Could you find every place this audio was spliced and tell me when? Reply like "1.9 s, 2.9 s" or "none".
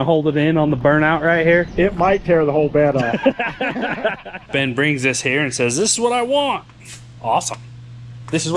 1.7 s, 4.3 s